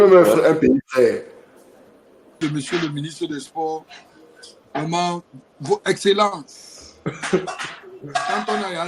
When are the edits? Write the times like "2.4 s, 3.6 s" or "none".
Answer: 2.4 s